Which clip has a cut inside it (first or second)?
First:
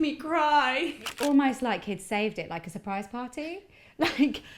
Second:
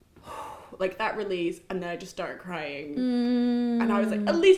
first